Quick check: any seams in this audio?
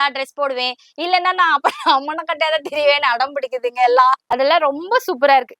yes; 1 cut; at 4.2 s

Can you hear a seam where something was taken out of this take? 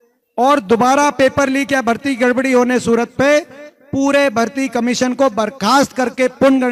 no; 0 cuts

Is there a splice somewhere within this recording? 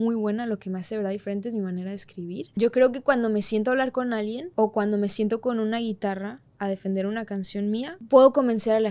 yes; 3 cuts; at 2.5 s, 4.4 s, 8.0 s

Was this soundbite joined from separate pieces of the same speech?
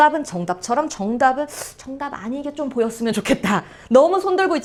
no; 0 cuts

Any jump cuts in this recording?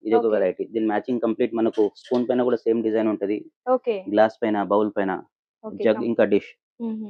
no; 0 cuts

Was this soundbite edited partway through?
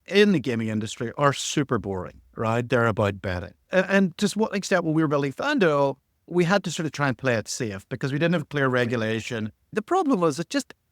yes; 2 cuts; at 2.7 s, 9.7 s

